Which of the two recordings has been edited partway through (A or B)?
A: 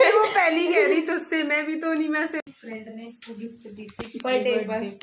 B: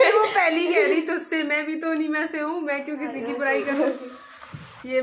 A